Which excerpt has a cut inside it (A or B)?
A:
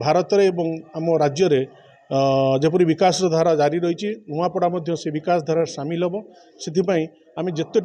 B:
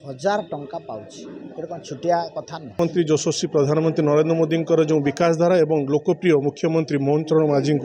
B